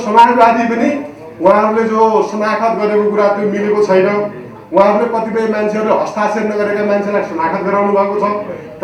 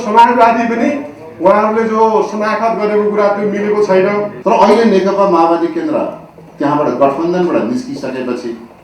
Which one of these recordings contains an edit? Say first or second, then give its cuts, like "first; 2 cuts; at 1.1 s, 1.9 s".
second; 1 cut; at 4.3 s